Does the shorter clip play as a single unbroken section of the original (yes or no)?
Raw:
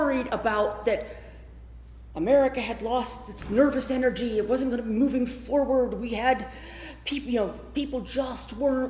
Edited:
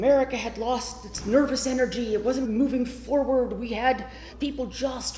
no